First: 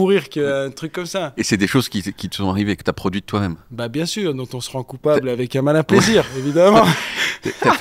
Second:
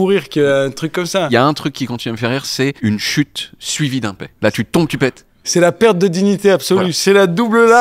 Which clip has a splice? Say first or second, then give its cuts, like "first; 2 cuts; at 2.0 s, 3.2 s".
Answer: second; 4 cuts; at 1.3 s, 2.8 s, 4.3 s, 5.5 s